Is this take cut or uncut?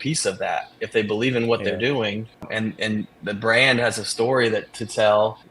uncut